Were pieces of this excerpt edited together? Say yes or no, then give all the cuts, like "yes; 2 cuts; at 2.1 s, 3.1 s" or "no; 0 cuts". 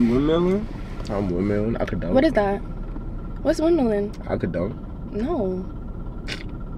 no; 0 cuts